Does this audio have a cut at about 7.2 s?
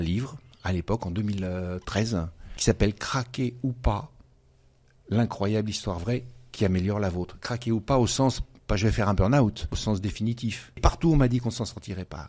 no; 3 cuts; at 2.4 s, 9.7 s, 10.8 s

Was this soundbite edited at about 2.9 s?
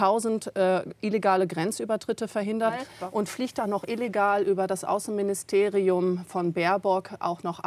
yes; 1 cut; at 2.9 s

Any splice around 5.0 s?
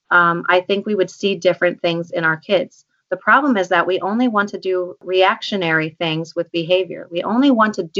yes; 1 cut; at 5.0 s

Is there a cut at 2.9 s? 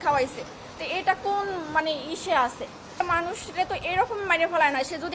yes; 1 cut; at 2.9 s

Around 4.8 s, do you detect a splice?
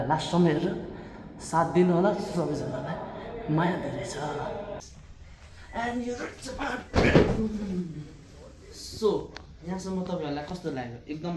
yes; 1 cut; at 4.8 s

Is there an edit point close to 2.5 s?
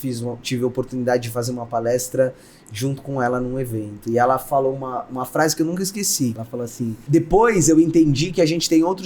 no; 1 cut; at 6.4 s

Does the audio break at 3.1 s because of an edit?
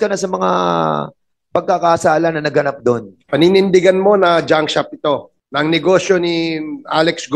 yes; 2 cuts; at 3.1 s, 5.4 s

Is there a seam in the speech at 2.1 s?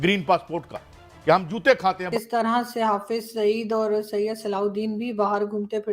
yes; 1 cut; at 2.1 s

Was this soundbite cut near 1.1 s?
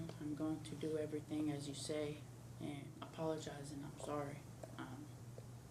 no; 1 cut; at 2.9 s

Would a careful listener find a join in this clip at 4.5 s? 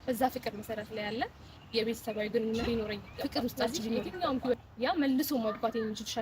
yes; 1 cut; at 4.5 s

